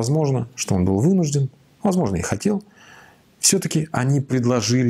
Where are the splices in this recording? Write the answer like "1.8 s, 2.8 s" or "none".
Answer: none